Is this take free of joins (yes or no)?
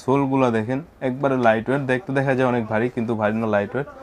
yes